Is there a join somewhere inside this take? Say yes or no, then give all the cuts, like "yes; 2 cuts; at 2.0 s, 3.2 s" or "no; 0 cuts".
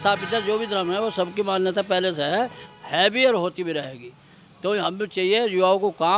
no; 0 cuts